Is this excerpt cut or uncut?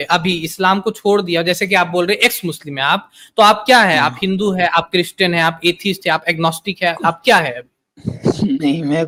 uncut